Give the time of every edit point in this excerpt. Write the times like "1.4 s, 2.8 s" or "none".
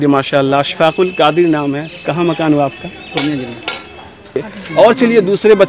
4.5 s